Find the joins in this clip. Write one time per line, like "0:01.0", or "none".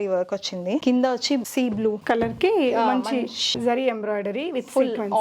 0:00.8
0:02.0
0:03.5